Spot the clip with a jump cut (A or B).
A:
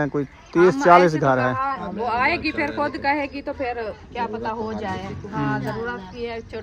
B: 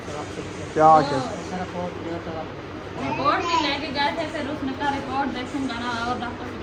A